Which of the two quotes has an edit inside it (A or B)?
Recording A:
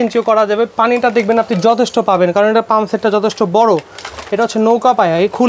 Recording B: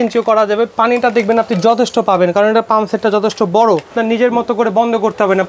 B